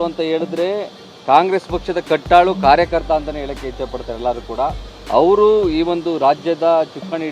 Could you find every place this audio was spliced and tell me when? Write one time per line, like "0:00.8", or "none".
none